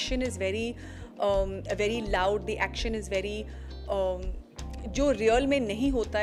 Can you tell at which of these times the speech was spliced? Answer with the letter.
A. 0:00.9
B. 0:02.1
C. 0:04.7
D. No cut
D